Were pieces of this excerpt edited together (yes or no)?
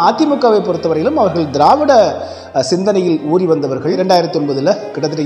yes